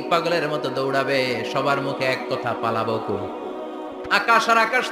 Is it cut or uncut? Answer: cut